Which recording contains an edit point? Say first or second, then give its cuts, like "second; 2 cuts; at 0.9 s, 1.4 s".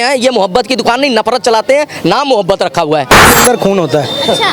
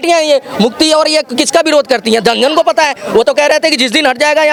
first; 1 cut; at 3.3 s